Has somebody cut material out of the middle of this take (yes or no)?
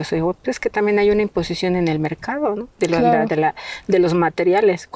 no